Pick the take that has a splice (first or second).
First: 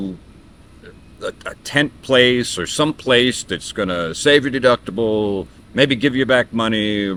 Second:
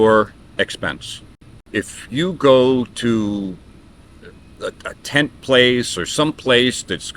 second